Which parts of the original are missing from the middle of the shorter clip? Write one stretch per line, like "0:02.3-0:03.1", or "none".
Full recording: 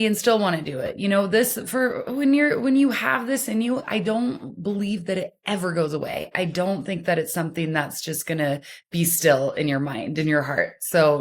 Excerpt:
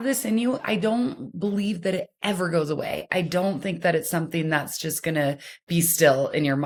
none